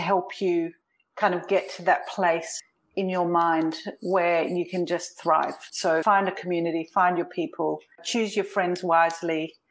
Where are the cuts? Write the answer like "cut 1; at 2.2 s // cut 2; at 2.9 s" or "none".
cut 1; at 8.0 s